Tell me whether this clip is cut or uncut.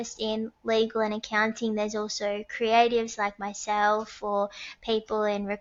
uncut